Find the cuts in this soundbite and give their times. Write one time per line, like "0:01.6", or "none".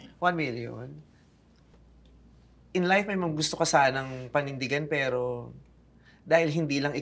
0:01.8